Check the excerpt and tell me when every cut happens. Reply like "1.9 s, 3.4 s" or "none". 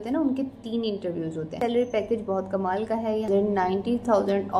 1.5 s, 3.3 s